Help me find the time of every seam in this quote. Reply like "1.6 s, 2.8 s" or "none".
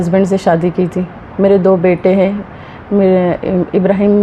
none